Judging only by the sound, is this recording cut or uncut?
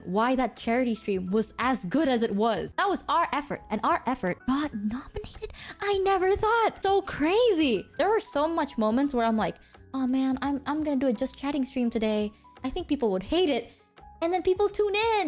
cut